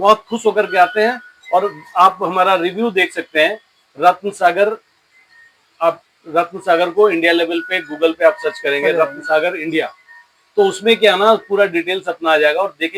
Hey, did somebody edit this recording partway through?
no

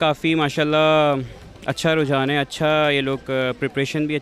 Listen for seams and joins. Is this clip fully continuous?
yes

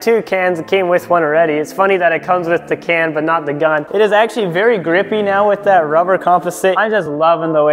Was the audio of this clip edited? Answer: yes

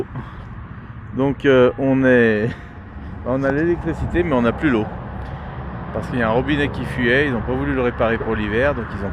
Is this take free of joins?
yes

